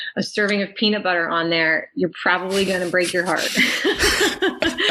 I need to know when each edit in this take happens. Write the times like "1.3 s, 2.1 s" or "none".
none